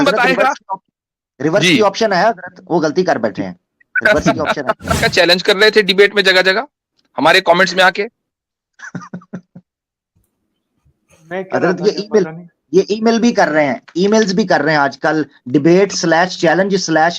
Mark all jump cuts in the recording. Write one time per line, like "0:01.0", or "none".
0:05.0